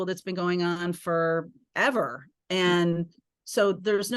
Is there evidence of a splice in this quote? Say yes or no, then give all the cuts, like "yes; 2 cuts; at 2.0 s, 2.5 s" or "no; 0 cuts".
yes; 1 cut; at 1.6 s